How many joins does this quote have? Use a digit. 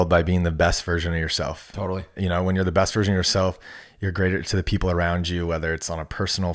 0